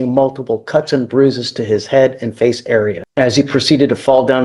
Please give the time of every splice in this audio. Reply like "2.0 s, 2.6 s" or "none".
3.0 s